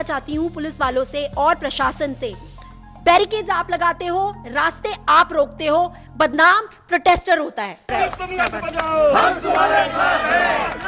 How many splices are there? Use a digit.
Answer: 1